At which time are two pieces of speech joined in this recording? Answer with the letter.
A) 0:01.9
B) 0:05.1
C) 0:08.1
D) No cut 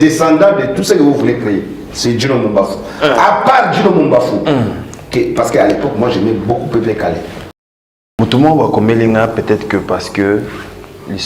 C